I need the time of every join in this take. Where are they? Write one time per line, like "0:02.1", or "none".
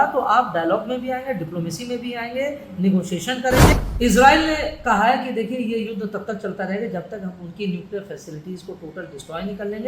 0:03.7